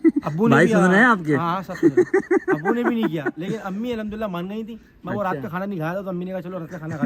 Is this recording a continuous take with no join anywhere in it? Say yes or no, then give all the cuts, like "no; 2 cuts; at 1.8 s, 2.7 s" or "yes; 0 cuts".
yes; 0 cuts